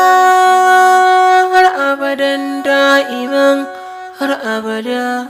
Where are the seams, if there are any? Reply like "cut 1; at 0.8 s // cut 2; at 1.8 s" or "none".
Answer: cut 1; at 4.4 s